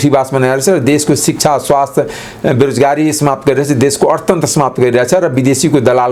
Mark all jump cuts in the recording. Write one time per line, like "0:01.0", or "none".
none

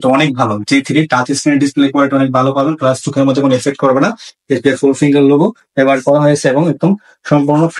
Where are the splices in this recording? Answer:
0:04.3

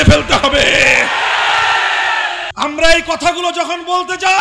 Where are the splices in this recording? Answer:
0:02.4

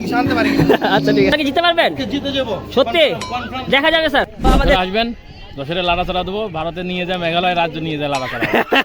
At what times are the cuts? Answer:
0:01.3
0:04.8

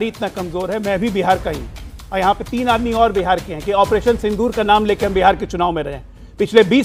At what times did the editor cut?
none

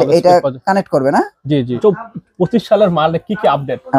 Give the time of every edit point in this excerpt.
0:01.8

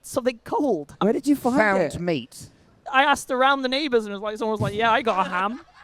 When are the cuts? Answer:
0:00.9

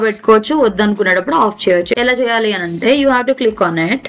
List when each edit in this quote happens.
none

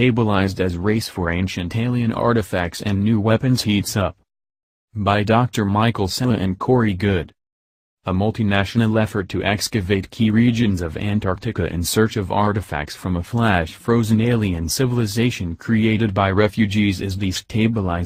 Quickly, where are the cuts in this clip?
none

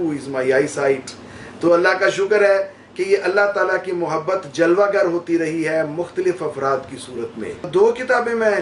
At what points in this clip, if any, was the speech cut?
0:07.7

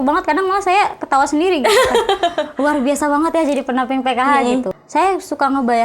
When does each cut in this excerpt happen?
0:04.7

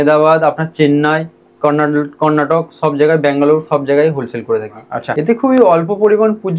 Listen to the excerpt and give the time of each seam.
0:05.0

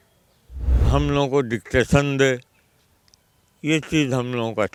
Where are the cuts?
none

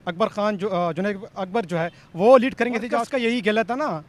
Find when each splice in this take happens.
0:02.9

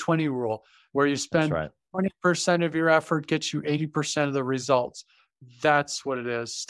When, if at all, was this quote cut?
none

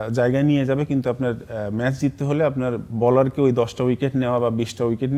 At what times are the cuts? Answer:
none

